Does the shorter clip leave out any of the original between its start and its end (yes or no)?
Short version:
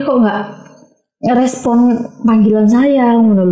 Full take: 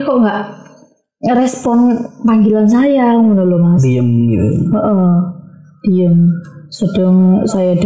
no